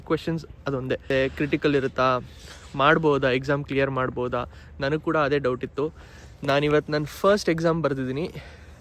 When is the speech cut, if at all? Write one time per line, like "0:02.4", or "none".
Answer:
0:01.0

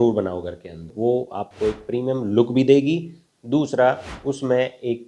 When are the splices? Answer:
0:00.9

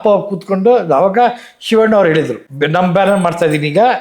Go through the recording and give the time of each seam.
0:02.4

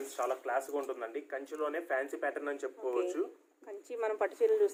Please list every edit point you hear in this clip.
none

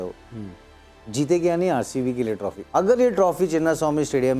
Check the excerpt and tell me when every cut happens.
0:02.5

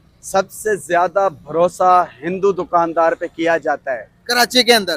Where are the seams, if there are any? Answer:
none

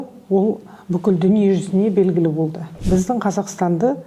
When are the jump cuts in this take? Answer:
0:02.7

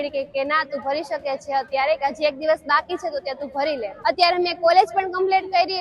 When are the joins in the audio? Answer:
0:03.9

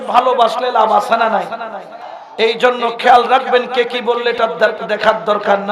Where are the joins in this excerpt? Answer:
0:02.1

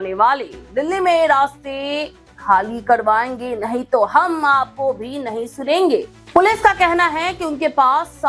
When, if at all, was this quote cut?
0:06.2

